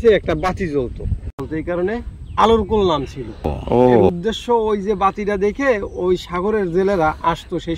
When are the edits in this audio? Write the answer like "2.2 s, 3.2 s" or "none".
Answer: 1.4 s, 4.1 s